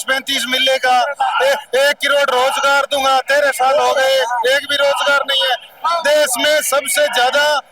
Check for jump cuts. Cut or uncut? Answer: uncut